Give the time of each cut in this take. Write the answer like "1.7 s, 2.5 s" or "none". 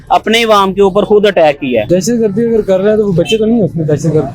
1.9 s